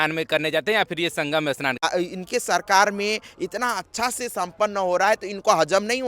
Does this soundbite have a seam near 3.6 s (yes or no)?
no